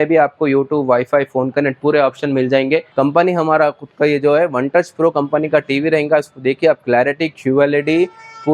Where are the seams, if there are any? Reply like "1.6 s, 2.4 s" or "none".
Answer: 2.9 s

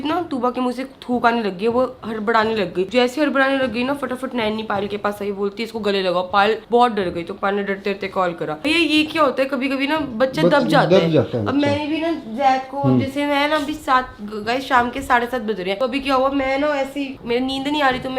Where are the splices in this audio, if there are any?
none

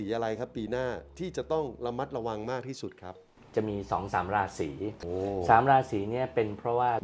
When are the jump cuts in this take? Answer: 5.0 s

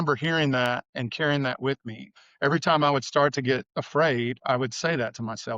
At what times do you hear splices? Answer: 0.9 s, 2.2 s, 3.7 s

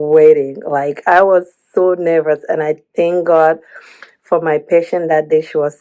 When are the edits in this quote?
none

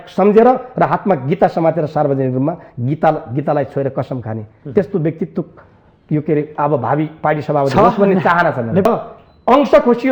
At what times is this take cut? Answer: 8.9 s

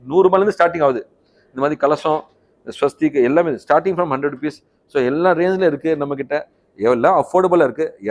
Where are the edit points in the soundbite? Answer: none

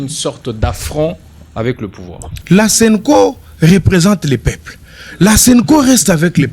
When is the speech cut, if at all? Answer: 2.3 s

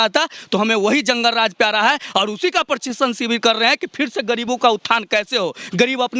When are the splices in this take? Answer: none

